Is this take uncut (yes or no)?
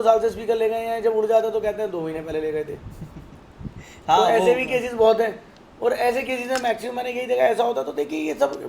yes